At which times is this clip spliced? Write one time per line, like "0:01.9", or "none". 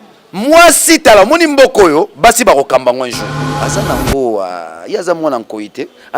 0:03.5